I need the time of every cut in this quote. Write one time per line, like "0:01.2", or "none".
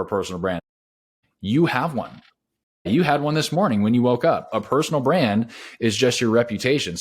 0:00.9
0:02.9

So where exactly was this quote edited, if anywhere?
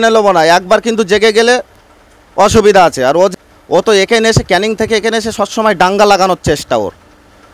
0:03.3

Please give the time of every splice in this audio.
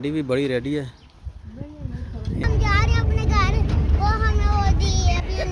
0:02.4

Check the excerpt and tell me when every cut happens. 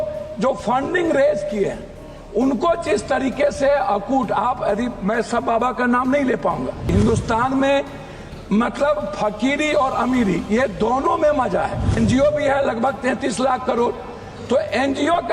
0:06.9
0:12.0

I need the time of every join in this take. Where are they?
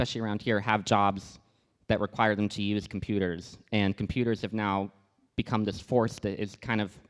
none

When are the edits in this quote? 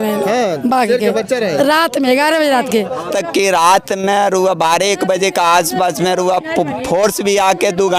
0:03.1

